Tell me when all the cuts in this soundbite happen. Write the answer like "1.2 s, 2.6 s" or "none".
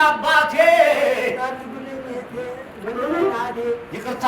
none